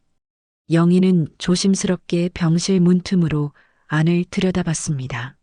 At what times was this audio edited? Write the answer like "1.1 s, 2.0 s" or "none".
none